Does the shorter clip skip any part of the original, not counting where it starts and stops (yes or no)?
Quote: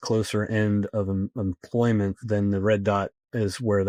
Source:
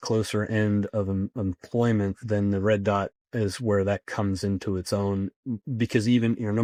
no